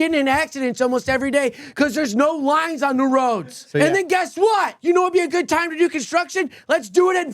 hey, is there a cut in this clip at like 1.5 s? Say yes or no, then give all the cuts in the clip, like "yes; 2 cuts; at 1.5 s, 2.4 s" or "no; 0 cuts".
no; 2 cuts; at 3.6 s, 4.8 s